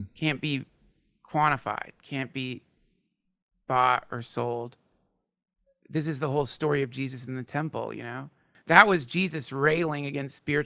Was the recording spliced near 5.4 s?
no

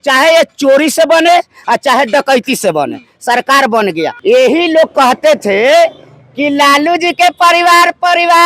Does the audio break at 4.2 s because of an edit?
yes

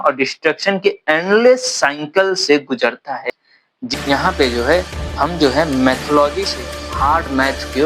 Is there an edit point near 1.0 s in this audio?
no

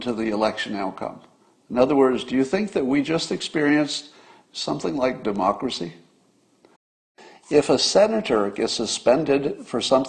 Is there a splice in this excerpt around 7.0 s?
yes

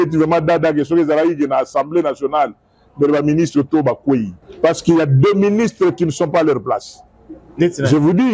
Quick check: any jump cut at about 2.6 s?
no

